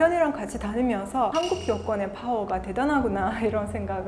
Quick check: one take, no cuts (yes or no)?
yes